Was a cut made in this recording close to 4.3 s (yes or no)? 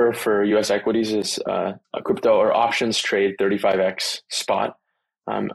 no